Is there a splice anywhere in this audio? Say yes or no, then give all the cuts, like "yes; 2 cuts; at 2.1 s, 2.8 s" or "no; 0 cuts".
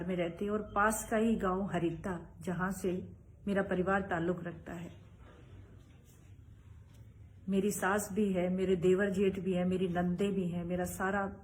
yes; 1 cut; at 1.8 s